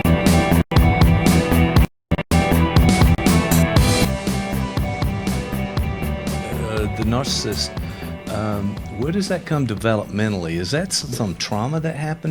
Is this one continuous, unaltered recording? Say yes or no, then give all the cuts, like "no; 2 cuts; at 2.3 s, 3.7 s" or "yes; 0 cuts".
no; 1 cut; at 4.1 s